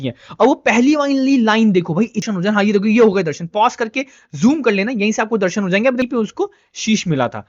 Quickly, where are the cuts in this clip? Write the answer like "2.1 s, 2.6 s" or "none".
2.2 s, 6.0 s